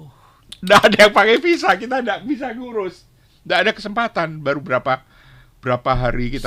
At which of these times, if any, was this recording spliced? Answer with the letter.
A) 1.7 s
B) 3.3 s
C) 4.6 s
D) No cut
D